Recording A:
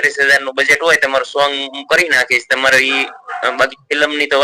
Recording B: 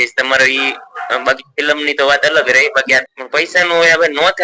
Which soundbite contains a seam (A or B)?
B